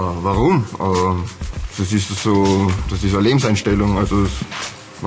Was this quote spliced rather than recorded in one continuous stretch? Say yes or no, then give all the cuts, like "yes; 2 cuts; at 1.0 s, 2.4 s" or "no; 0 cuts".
no; 0 cuts